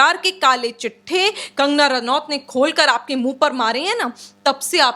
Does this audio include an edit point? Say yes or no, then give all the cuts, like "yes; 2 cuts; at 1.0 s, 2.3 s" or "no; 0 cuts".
no; 0 cuts